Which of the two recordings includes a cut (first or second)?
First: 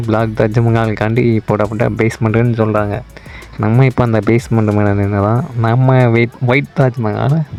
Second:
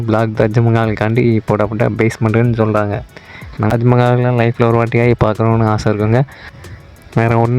second